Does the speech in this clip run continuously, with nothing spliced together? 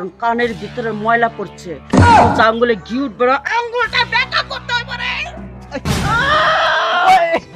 no; 1 cut; at 5.6 s

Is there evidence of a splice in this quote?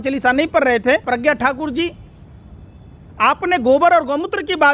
yes; 1 cut; at 1.0 s

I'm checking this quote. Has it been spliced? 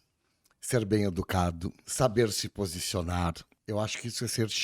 yes; 2 cuts; at 1.8 s, 3.5 s

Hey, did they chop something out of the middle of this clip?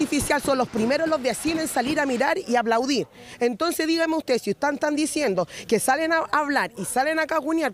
yes; 1 cut; at 2.8 s

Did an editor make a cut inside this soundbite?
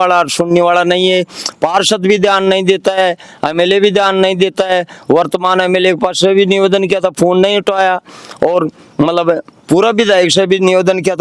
no; 0 cuts

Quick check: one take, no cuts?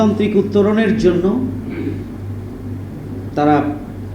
yes; 0 cuts

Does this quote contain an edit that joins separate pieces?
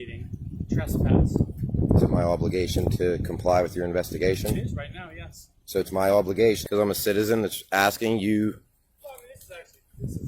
yes; 1 cut; at 6.6 s

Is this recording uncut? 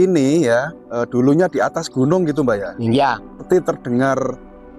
no; 1 cut; at 3.4 s

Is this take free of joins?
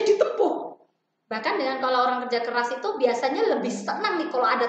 yes; 0 cuts

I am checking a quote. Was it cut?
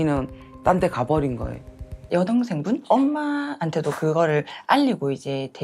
yes; 1 cut; at 2.0 s

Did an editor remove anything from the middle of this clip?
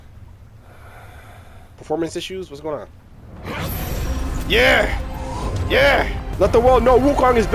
yes; 1 cut; at 6.2 s

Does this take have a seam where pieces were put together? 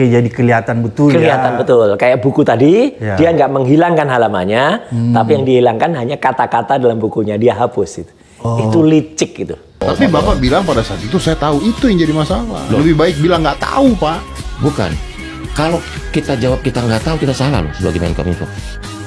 yes; 1 cut; at 9.8 s

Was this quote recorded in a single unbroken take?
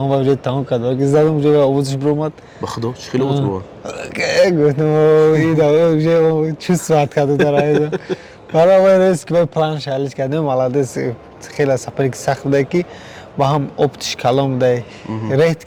yes; 0 cuts

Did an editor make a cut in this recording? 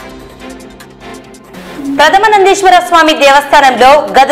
yes; 1 cut; at 1.4 s

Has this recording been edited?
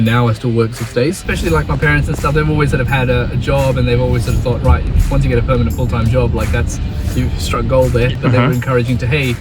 yes; 2 cuts; at 1.2 s, 8.1 s

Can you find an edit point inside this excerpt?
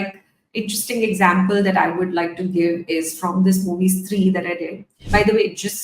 yes; 1 cut; at 4.9 s

